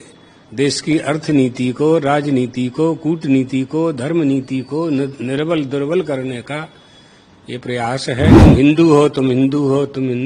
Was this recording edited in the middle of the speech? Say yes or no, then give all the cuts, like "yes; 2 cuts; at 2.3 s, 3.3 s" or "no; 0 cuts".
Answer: yes; 1 cut; at 8.4 s